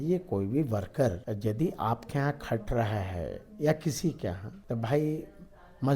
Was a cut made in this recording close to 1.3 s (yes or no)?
yes